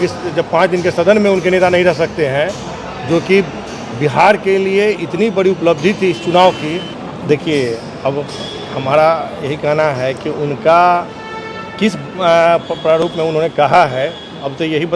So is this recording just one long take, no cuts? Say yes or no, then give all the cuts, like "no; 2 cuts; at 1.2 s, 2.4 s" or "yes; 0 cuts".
no; 1 cut; at 7.0 s